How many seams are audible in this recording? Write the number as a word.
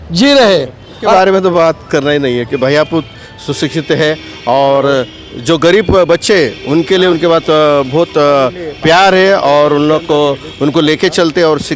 one